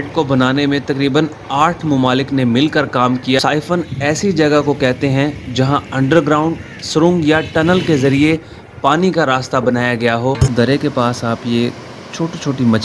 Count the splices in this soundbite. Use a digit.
2